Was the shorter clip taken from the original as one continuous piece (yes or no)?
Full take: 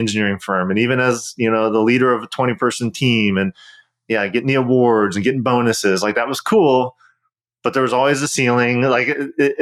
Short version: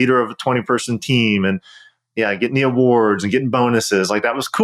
yes